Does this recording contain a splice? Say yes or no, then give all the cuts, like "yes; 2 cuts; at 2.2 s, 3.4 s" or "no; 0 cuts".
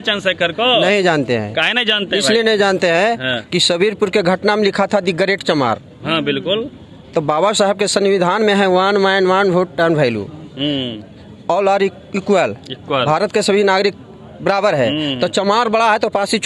no; 0 cuts